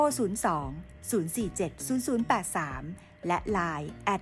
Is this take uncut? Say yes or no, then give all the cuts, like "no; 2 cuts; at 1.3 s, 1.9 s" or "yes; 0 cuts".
yes; 0 cuts